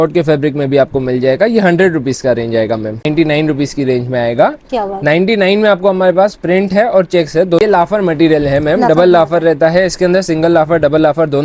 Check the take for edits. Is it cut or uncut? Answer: cut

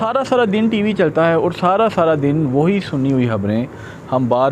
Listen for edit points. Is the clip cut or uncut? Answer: uncut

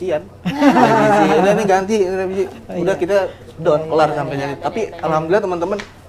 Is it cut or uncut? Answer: uncut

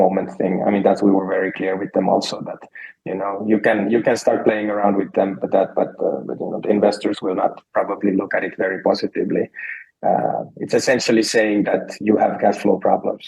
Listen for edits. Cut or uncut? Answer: uncut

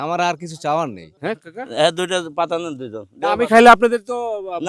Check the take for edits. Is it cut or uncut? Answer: cut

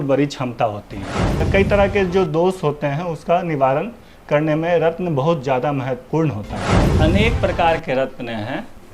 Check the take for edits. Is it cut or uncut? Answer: cut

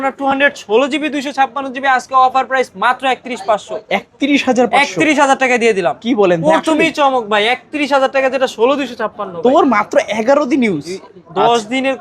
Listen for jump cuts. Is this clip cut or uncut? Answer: uncut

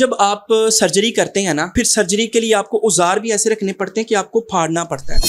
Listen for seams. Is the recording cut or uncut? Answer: cut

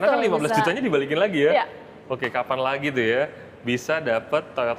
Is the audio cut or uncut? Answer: uncut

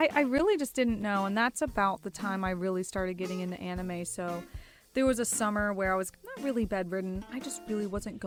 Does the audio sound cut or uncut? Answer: uncut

